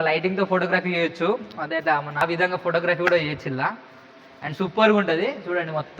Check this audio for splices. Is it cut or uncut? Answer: cut